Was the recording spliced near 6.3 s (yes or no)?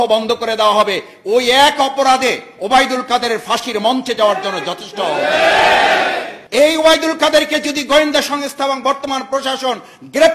yes